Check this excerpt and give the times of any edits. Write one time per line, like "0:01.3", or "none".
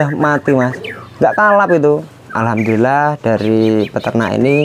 0:02.3